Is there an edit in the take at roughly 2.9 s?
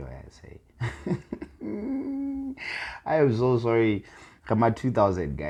no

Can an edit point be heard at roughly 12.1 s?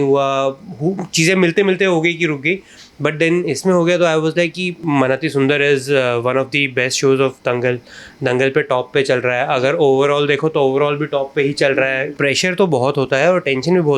yes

